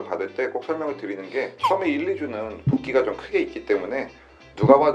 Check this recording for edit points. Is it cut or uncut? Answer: uncut